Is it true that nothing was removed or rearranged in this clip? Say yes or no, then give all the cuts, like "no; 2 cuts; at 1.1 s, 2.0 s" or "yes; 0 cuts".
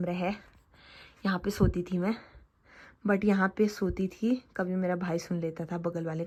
yes; 0 cuts